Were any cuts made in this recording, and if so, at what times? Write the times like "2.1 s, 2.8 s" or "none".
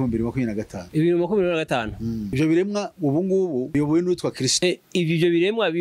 none